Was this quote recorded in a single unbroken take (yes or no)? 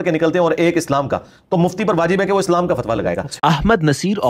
no